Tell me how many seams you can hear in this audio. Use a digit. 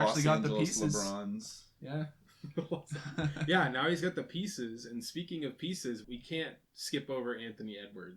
1